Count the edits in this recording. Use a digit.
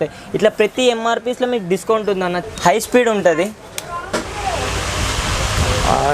1